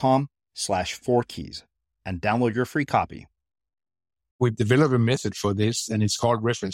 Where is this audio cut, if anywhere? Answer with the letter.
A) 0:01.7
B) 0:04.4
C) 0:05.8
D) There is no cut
B